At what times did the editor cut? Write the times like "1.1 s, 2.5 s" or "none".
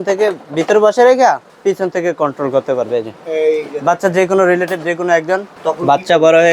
1.5 s, 5.5 s